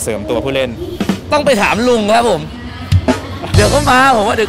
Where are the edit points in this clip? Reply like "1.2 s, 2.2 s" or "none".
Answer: none